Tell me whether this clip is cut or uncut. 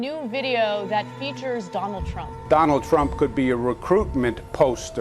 cut